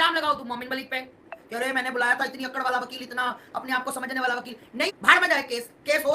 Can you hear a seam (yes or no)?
yes